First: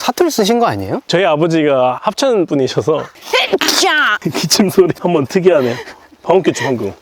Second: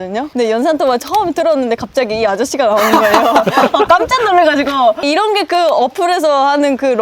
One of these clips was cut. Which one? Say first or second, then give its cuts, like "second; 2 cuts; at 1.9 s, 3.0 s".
first; 5 cuts; at 1.0 s, 2.0 s, 3.1 s, 4.2 s, 5.0 s